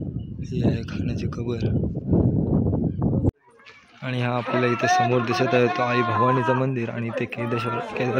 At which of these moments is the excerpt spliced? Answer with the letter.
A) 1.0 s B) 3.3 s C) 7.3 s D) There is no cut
B